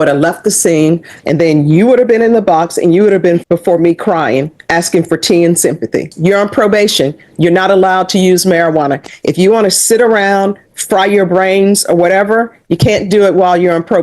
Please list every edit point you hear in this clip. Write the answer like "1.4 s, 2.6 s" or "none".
1.1 s, 3.4 s, 6.1 s